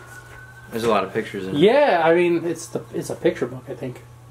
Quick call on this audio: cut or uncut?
uncut